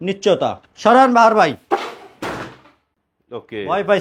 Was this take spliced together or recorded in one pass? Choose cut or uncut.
uncut